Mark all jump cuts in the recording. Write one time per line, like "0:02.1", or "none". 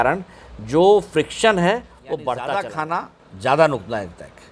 0:02.7